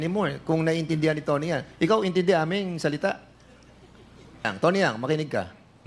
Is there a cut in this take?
yes; 1 cut; at 4.5 s

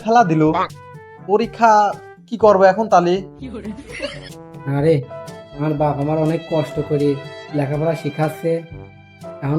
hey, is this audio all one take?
no; 1 cut; at 4.3 s

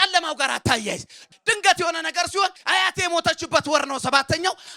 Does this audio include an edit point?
yes; 2 cuts; at 1.2 s, 2.6 s

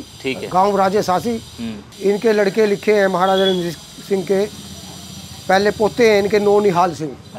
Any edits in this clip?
yes; 1 cut; at 1.9 s

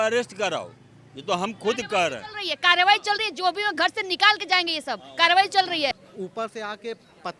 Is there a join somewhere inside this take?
yes; 1 cut; at 5.9 s

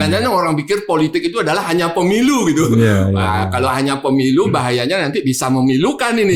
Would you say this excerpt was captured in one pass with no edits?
yes; 0 cuts

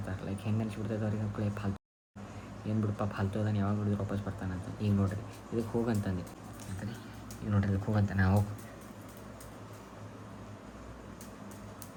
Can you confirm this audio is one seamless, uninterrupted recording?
yes; 0 cuts

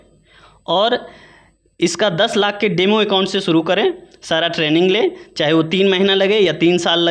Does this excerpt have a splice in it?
no; 0 cuts

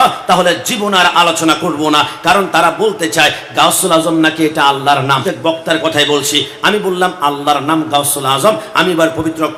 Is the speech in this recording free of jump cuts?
yes; 0 cuts

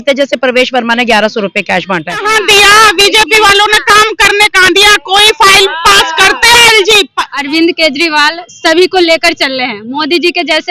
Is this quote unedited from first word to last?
no; 2 cuts; at 2.2 s, 7.3 s

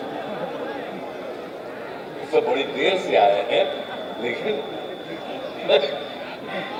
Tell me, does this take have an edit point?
no; 0 cuts

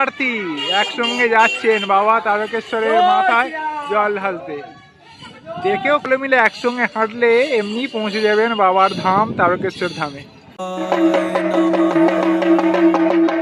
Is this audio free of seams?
yes; 0 cuts

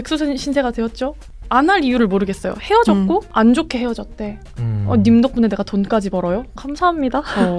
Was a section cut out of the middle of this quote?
yes; 2 cuts; at 1.3 s, 3.3 s

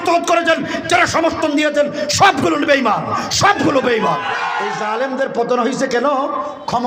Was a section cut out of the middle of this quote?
yes; 1 cut; at 4.8 s

